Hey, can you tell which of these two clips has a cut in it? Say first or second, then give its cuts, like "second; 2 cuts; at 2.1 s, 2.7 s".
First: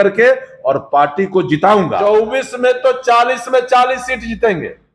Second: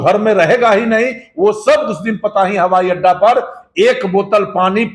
first; 1 cut; at 2.0 s